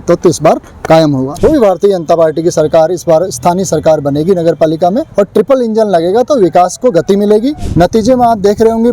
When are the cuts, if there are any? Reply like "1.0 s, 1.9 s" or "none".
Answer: 1.3 s, 5.1 s, 7.6 s